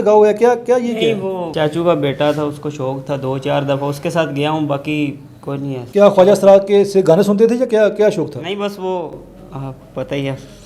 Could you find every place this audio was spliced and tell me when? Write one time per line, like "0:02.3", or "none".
none